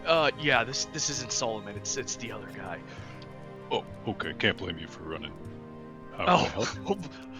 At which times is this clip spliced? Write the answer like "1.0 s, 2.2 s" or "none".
none